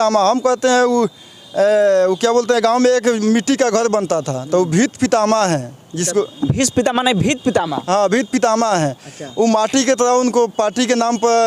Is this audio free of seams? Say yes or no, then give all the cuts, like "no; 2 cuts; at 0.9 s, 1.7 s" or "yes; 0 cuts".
yes; 0 cuts